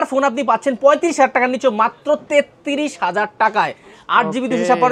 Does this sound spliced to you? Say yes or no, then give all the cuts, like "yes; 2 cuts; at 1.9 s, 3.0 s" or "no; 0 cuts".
no; 0 cuts